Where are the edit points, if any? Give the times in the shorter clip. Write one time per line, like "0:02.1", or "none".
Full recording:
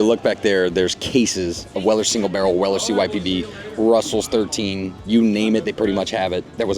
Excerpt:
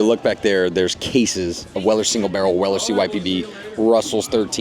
none